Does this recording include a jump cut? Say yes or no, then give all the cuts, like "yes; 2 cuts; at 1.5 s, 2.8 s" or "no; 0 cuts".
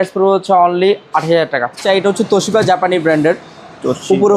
yes; 1 cut; at 1.8 s